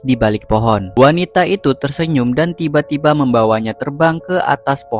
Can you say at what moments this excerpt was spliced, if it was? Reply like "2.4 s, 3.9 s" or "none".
none